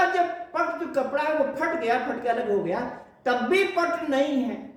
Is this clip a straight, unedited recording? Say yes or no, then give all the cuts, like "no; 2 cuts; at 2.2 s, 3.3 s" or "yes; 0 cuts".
yes; 0 cuts